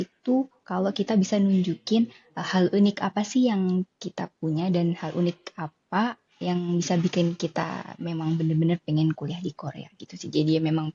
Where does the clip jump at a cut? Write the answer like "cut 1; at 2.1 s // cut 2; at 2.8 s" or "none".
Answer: none